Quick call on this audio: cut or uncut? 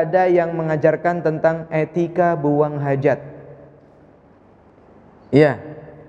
cut